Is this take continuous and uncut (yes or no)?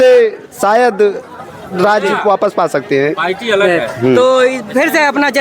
yes